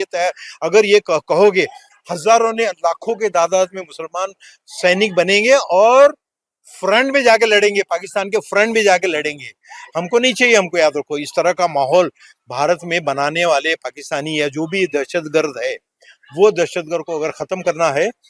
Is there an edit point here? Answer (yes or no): no